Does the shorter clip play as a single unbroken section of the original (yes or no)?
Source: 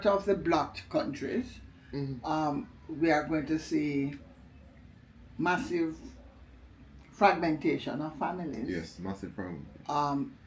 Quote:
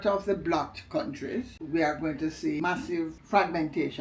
no